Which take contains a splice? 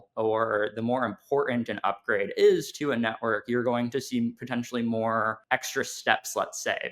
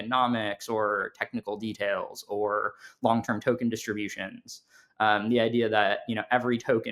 first; 1 cut; at 5.4 s

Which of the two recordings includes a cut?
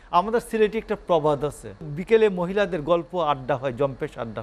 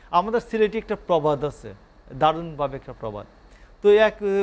first; 1 cut; at 1.9 s

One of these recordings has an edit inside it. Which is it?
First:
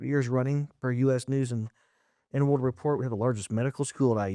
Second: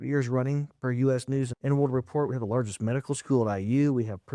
second; 1 cut; at 1.5 s

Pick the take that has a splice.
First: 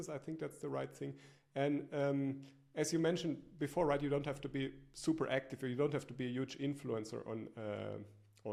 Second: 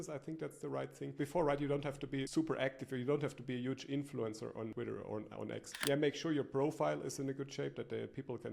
second; 4 cuts; at 1.1 s, 2.3 s, 4.7 s, 5.8 s

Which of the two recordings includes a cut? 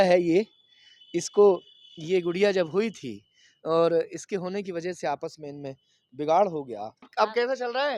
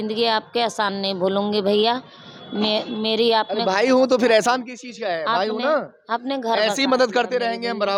first; 1 cut; at 7.1 s

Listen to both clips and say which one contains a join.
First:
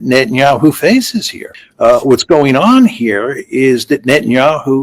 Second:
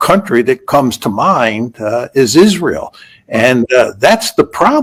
first; 1 cut; at 1.5 s

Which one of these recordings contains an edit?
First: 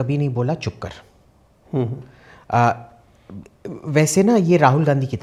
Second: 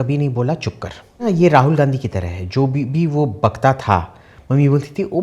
second; 1 cut; at 1.2 s

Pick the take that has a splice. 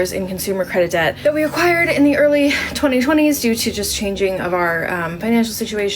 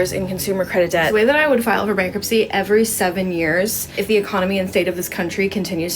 second; 2 cuts; at 1.1 s, 3.9 s

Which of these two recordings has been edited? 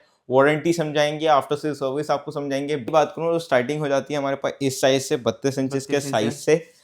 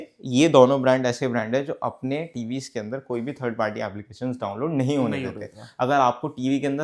first; 1 cut; at 2.8 s

